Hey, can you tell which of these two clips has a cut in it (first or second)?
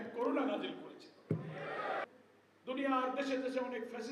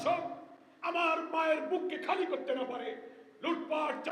first